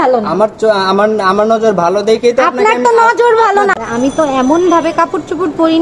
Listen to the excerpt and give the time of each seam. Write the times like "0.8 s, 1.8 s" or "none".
3.7 s